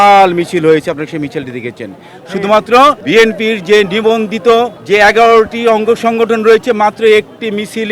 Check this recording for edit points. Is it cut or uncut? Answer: cut